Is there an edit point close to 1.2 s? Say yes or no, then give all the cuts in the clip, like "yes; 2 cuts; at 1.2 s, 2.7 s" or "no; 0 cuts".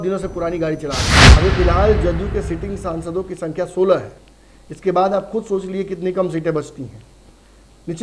yes; 1 cut; at 1.2 s